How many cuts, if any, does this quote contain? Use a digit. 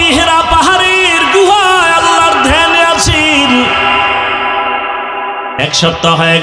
0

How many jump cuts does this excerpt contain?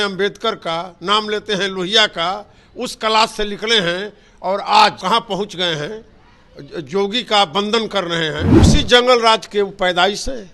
2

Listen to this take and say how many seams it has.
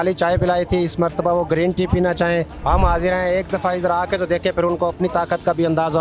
1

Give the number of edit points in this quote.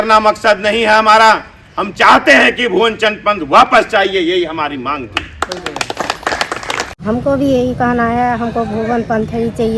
1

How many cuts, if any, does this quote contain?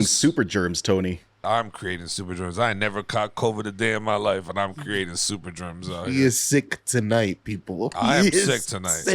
1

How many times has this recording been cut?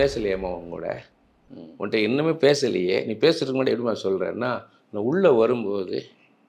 0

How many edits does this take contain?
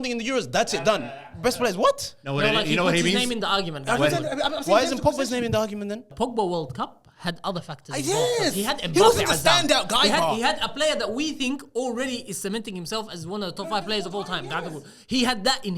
1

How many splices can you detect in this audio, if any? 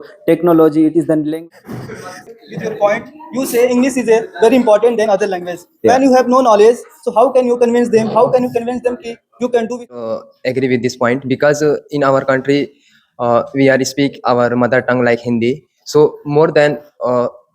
2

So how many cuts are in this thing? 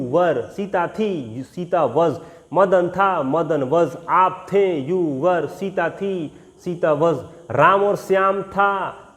0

